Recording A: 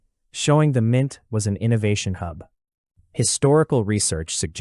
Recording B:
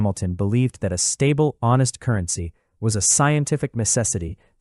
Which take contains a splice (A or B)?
B